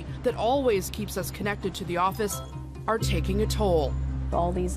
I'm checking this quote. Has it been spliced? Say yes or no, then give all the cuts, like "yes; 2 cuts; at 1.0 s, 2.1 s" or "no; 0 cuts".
yes; 1 cut; at 2.5 s